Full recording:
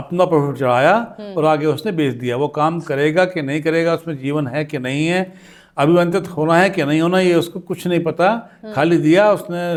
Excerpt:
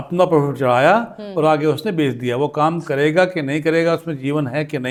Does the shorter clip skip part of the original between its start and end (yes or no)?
no